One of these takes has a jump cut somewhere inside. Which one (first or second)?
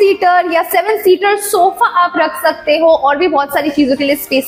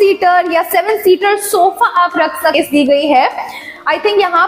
second